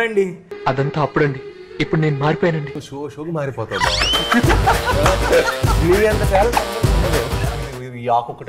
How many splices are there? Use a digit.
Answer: 1